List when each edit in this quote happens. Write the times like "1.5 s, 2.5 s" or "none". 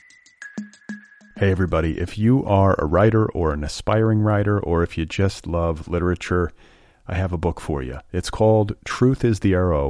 0.9 s